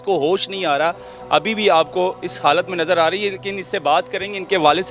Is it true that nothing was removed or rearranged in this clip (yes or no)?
yes